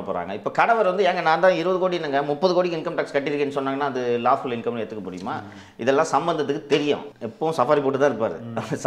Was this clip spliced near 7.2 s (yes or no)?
yes